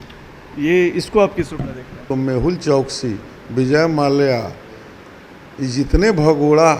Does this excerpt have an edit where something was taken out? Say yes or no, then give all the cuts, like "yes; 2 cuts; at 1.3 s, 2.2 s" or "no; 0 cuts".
yes; 1 cut; at 1.9 s